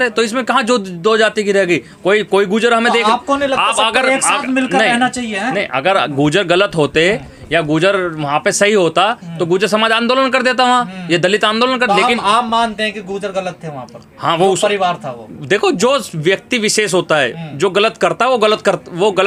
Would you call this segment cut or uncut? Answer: uncut